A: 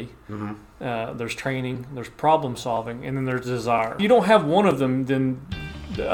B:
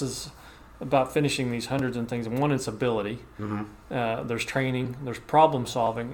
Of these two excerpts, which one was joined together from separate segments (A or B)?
A